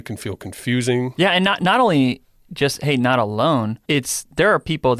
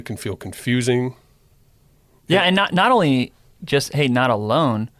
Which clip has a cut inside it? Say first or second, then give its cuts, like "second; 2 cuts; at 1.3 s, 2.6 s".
first; 2 cuts; at 1.1 s, 3.8 s